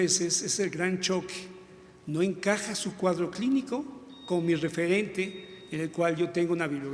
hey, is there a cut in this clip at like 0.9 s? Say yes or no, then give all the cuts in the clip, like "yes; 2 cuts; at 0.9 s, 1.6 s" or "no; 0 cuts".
no; 1 cut; at 3.2 s